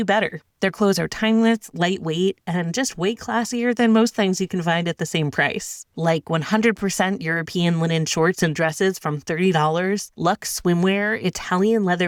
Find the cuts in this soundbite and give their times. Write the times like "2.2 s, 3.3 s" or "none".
none